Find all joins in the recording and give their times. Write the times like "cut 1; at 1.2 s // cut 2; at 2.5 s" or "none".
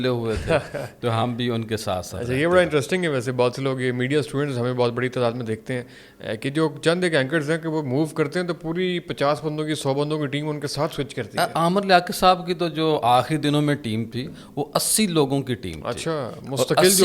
none